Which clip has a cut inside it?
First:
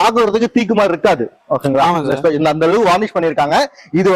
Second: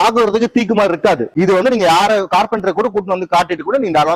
second; 1 cut; at 1.3 s

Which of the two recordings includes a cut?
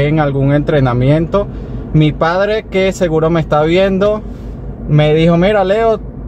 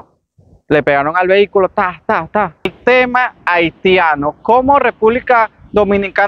second; 1 cut; at 2.8 s

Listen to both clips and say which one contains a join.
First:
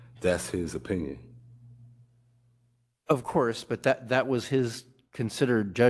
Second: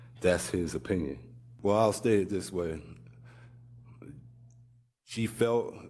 second; 1 cut; at 1.4 s

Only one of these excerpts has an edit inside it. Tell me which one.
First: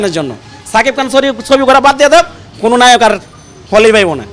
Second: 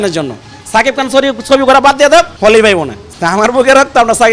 second; 2 cuts; at 2.3 s, 3.0 s

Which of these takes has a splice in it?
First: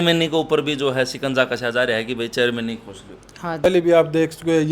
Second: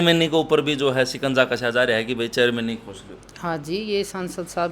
first; 1 cut; at 3.6 s

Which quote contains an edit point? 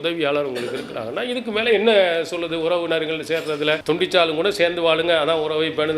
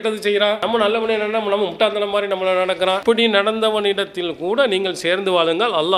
first; 1 cut; at 3.8 s

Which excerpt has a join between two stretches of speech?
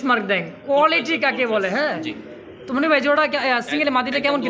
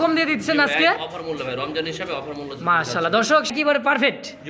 second; 1 cut; at 3.5 s

